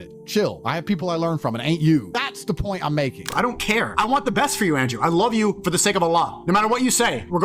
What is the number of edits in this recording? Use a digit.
1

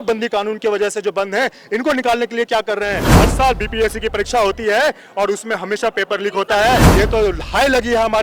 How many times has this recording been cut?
2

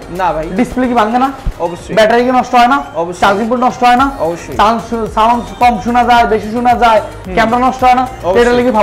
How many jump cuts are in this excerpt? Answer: 0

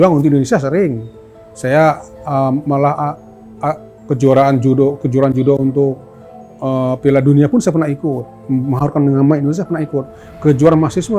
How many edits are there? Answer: 0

